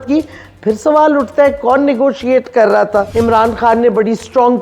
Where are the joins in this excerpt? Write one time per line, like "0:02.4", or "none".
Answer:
0:03.1